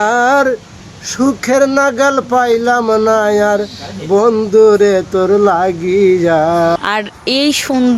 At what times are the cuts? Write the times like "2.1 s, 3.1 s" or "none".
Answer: 6.8 s